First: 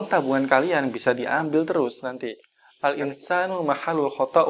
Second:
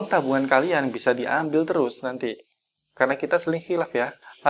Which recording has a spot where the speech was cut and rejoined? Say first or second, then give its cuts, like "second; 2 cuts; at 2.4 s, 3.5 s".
first; 1 cut; at 2.6 s